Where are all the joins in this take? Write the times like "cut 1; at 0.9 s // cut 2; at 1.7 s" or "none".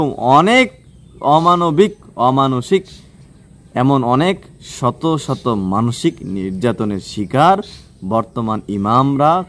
cut 1; at 1.1 s